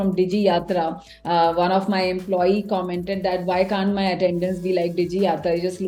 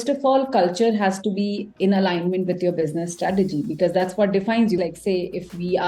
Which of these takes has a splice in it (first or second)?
second